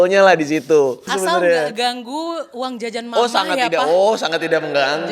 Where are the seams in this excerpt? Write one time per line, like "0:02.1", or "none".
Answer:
0:01.1